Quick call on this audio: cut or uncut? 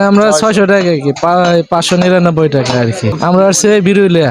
cut